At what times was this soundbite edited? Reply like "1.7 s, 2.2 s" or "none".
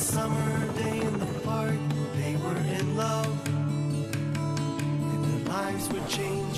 none